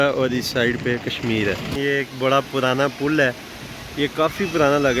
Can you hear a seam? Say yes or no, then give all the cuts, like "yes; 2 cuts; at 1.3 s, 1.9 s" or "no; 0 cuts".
yes; 1 cut; at 1.8 s